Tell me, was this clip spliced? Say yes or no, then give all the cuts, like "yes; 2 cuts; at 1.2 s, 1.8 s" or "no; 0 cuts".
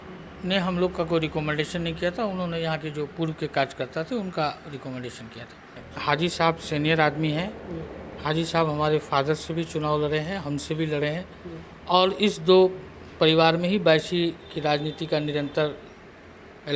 yes; 1 cut; at 5.9 s